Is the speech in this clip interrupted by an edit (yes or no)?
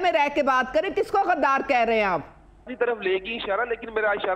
yes